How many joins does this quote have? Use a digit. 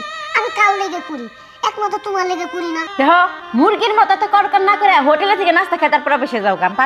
1